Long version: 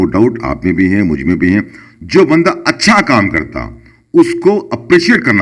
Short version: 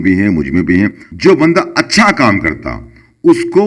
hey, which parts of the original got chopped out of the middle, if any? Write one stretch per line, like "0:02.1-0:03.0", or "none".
0:01.8-0:01.9